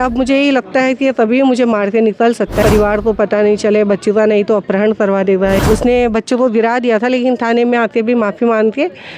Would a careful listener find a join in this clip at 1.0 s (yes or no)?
no